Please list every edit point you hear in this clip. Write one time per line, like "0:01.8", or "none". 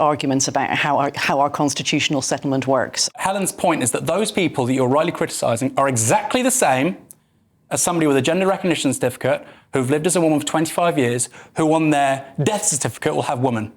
0:03.0

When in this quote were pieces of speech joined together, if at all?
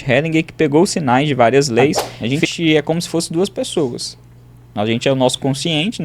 0:02.1

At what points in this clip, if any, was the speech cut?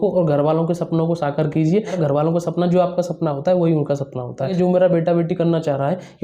0:02.0
0:04.5

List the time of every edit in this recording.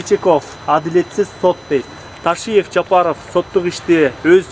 none

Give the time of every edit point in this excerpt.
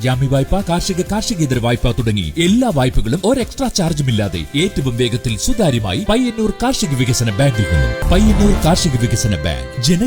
0:08.0

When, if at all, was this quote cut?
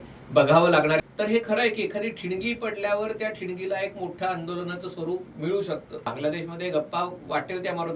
0:01.0
0:06.1

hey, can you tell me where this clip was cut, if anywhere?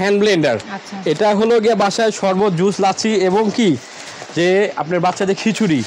none

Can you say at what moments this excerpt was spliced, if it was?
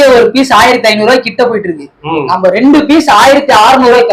none

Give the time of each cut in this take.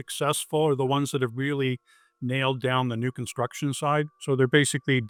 none

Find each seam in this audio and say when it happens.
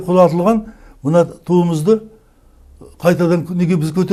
none

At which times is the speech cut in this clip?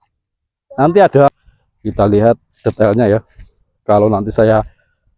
0:01.3

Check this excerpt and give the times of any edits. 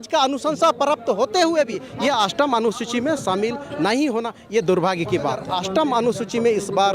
0:01.9
0:05.5

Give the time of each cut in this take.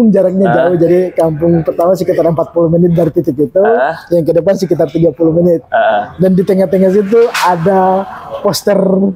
none

